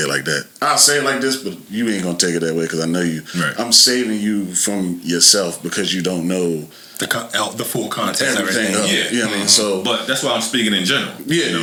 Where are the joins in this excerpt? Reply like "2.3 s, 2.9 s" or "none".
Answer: none